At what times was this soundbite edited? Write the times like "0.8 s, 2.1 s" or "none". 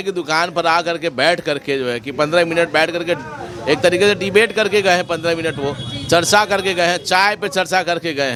none